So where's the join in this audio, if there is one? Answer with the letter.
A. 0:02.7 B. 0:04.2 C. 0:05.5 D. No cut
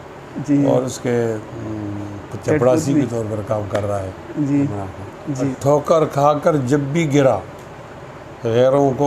C